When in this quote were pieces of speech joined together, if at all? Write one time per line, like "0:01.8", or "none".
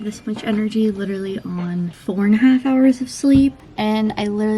0:02.0
0:03.6